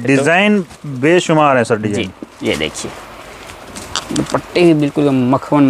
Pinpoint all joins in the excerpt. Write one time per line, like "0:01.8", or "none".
0:02.3